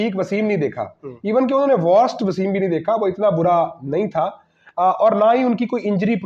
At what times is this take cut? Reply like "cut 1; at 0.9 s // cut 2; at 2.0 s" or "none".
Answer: none